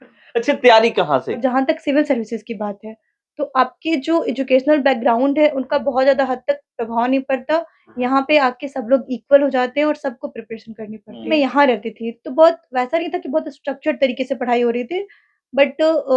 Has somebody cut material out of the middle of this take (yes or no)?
yes